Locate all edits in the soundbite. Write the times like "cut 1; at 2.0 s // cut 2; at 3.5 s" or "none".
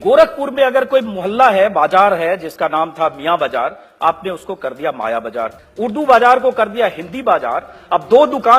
cut 1; at 5.6 s

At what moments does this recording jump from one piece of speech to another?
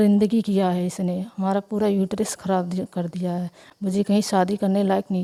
none

